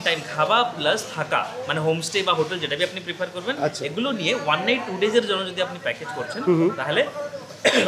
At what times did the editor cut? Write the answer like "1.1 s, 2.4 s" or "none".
none